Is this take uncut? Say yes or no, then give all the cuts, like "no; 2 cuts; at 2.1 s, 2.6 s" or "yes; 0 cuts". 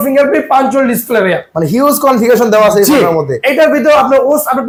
yes; 0 cuts